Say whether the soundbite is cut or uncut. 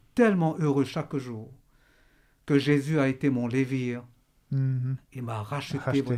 uncut